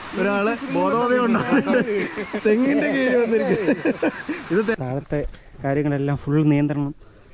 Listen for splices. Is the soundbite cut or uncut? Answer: cut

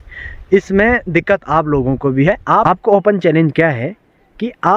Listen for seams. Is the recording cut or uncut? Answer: cut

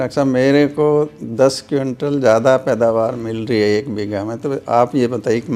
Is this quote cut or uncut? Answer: uncut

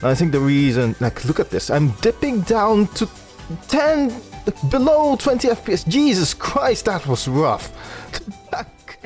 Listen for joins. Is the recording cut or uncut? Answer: uncut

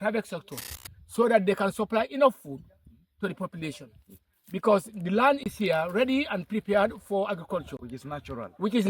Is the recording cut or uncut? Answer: uncut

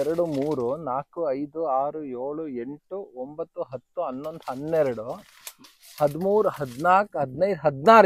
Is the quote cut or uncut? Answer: uncut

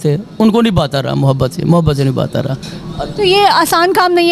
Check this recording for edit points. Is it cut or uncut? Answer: uncut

